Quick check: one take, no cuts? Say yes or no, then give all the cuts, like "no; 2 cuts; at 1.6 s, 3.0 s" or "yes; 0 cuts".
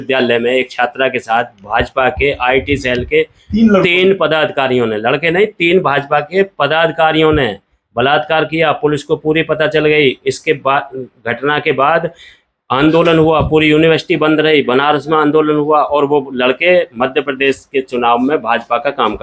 yes; 0 cuts